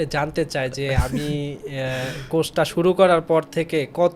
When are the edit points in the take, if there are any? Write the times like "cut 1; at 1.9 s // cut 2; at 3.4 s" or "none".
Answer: none